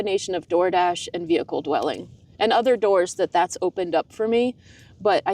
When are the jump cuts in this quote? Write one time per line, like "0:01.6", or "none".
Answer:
none